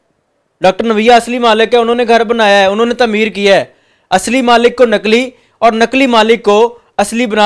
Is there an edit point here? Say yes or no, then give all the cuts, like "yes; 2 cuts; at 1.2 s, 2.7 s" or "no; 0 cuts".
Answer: no; 0 cuts